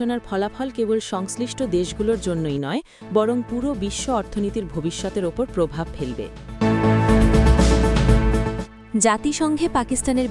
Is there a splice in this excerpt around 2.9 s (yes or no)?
no